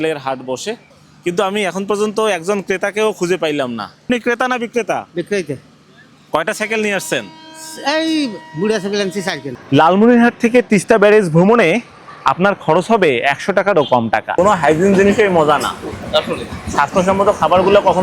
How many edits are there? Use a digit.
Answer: 4